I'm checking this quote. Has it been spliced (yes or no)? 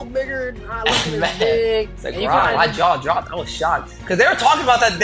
yes